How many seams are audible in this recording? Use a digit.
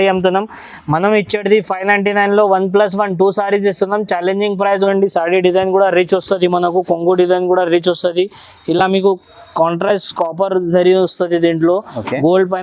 1